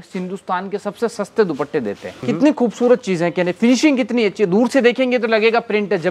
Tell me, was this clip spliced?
yes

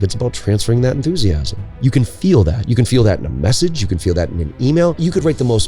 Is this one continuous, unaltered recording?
no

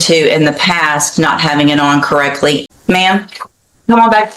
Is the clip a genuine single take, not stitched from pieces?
no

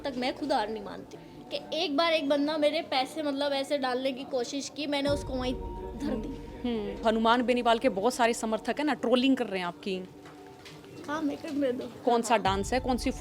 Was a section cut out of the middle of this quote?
yes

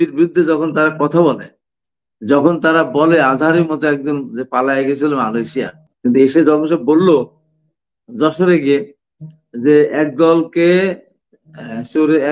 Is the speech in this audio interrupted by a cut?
yes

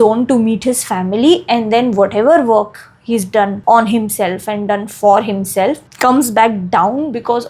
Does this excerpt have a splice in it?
yes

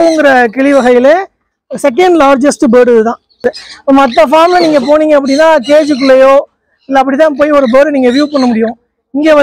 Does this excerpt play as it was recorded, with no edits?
no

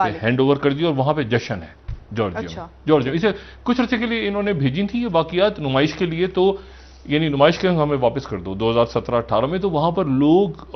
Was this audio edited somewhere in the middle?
no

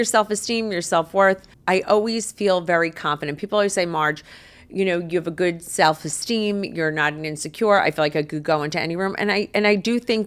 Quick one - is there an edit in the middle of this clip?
yes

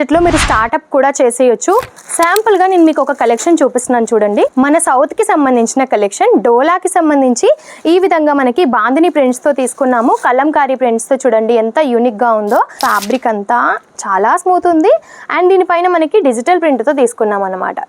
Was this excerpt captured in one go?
no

